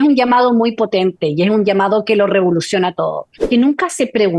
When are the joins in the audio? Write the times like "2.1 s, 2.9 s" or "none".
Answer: 3.3 s

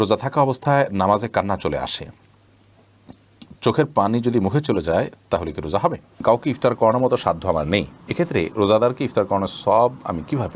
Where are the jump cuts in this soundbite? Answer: 6.2 s

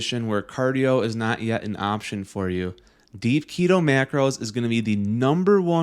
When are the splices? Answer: none

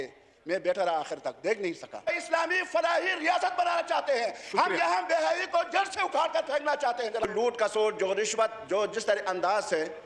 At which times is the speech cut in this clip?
2.1 s, 7.3 s

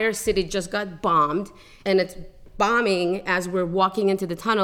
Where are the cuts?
1.8 s

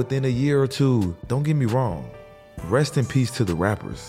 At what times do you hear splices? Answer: 1.2 s

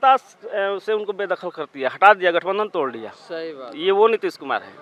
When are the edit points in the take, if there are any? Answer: none

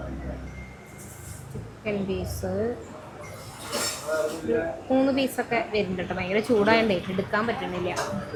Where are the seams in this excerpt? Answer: none

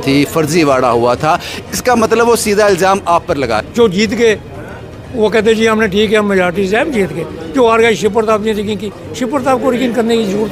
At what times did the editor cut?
3.6 s

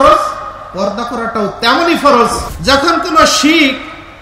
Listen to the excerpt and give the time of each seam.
2.5 s

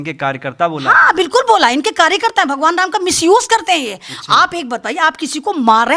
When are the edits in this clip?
none

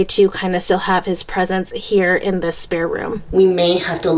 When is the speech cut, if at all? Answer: 3.2 s

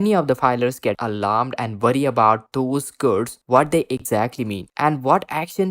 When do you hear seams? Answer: 1.0 s

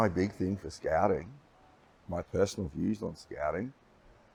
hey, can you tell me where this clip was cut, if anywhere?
none

